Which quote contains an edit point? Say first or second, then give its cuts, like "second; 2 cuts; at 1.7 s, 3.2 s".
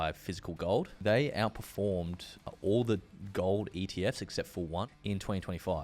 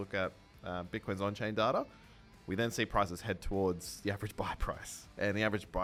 first; 3 cuts; at 0.9 s, 2.5 s, 4.9 s